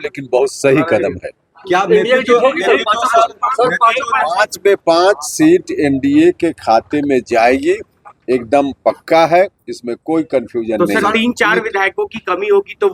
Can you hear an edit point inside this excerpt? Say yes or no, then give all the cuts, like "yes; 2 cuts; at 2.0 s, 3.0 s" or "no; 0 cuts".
no; 0 cuts